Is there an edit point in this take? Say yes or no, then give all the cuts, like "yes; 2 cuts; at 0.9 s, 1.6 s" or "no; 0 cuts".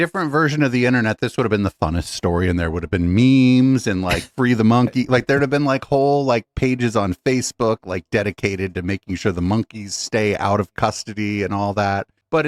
no; 0 cuts